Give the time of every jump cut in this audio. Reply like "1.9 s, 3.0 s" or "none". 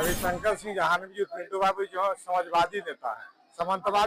none